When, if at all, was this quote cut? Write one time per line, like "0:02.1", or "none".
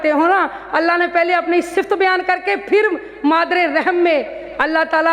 none